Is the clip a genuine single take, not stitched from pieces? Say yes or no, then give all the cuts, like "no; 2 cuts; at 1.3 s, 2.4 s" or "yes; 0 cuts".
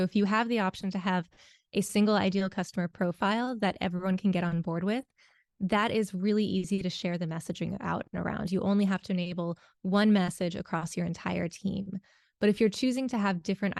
yes; 0 cuts